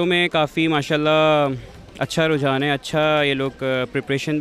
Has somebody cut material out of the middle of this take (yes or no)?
no